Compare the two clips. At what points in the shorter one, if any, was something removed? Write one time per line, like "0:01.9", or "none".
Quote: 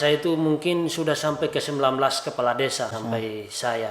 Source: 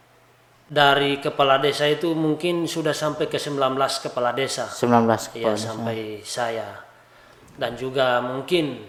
0:02.9